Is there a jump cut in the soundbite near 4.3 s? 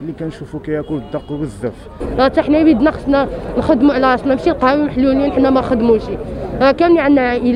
no; 1 cut; at 1.9 s

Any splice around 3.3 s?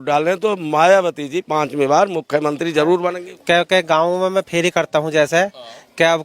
yes; 1 cut; at 3.3 s

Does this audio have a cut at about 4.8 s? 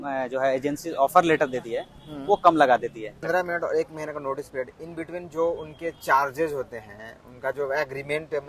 no; 1 cut; at 3.2 s

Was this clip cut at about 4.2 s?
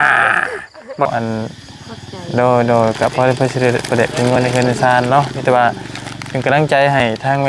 no; 1 cut; at 1.1 s

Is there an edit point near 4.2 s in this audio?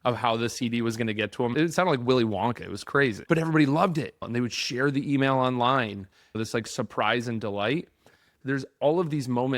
yes; 4 cuts; at 1.5 s, 3.2 s, 4.2 s, 6.3 s

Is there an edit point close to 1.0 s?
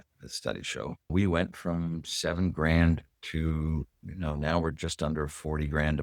yes; 1 cut; at 1.0 s

